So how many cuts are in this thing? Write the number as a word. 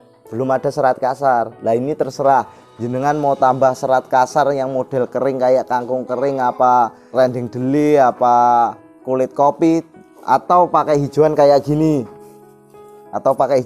two